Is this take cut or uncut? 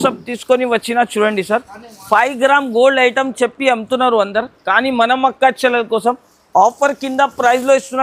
uncut